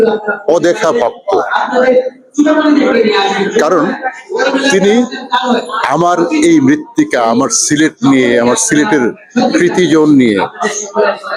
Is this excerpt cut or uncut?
uncut